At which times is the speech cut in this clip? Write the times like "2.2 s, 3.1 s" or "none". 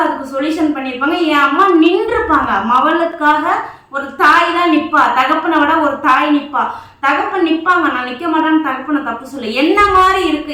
none

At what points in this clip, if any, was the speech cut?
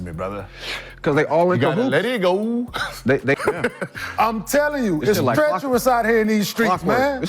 3.4 s

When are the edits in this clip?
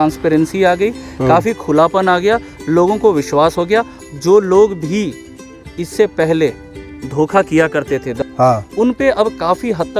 4.0 s, 8.1 s

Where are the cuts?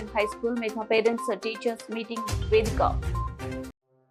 none

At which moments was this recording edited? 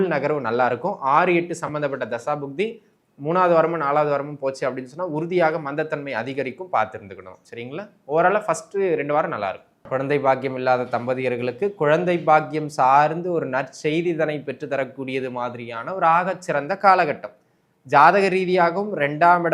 9.7 s

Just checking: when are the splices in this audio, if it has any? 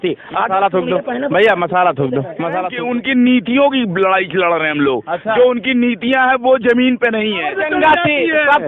2.7 s, 7.6 s

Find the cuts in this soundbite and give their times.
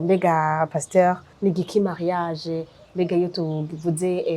1.3 s

